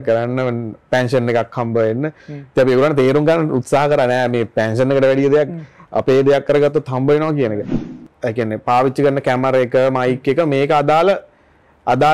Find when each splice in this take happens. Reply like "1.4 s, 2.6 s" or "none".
7.8 s